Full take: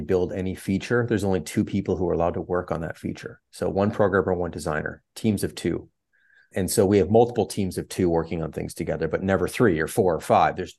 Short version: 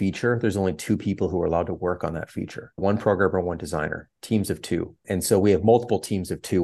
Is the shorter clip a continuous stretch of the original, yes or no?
no